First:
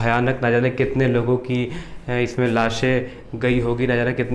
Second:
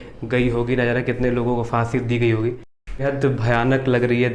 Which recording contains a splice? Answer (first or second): second